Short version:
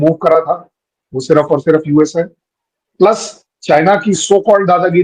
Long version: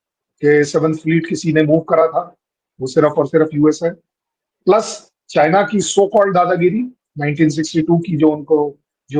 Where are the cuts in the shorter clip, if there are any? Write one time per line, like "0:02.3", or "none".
none